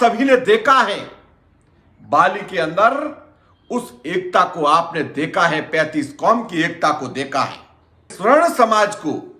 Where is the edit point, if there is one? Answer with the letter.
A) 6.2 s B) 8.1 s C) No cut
B